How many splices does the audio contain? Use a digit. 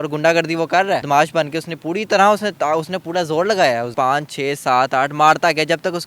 2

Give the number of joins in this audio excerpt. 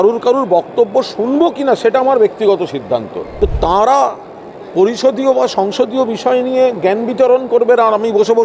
1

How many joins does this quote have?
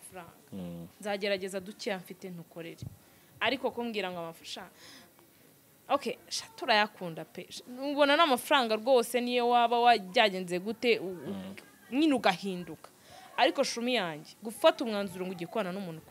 0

